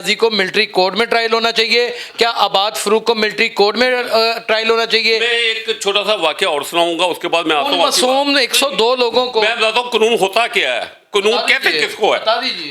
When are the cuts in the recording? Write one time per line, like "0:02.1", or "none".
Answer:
none